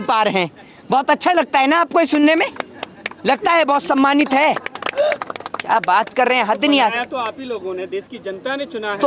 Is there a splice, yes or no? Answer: no